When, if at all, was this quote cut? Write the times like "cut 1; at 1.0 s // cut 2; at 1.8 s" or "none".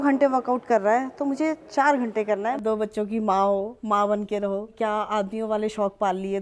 cut 1; at 2.6 s // cut 2; at 4.7 s